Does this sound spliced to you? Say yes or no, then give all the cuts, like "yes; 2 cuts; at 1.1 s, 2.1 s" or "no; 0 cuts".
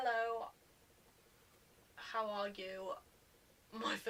no; 0 cuts